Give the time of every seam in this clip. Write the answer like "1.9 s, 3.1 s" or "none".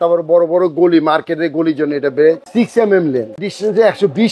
2.5 s, 3.4 s